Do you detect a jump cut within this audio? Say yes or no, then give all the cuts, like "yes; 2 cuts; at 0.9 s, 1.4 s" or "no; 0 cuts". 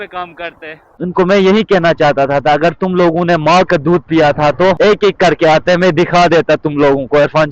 yes; 2 cuts; at 1.0 s, 4.8 s